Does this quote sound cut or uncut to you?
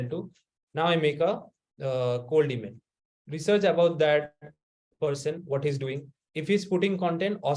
uncut